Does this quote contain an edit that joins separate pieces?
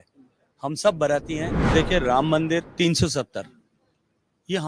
yes; 2 cuts; at 1.5 s, 2.7 s

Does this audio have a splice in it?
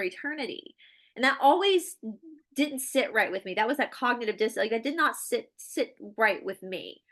no; 0 cuts

